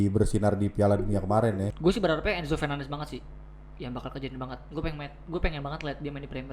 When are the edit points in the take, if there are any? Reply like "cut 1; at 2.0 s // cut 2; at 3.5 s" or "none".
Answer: cut 1; at 1.7 s